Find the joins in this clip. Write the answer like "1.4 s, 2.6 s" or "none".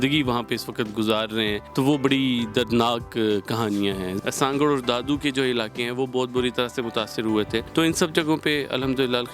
1.6 s, 4.1 s, 7.7 s